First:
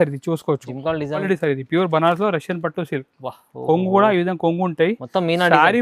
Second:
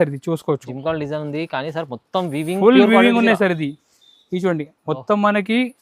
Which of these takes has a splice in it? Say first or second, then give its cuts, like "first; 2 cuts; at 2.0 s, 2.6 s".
first; 1 cut; at 1.2 s